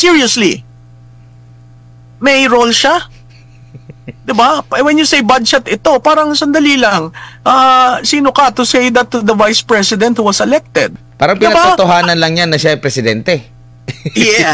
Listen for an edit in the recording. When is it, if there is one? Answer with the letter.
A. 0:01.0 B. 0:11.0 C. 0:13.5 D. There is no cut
B